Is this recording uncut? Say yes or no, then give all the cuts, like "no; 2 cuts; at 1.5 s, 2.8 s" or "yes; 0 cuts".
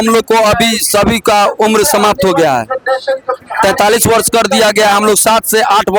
yes; 0 cuts